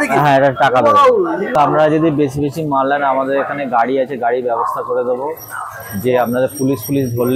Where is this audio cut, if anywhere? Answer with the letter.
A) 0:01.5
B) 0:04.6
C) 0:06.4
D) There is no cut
A